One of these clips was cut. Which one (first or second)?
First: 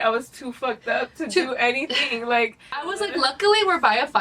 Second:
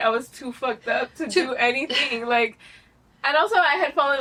first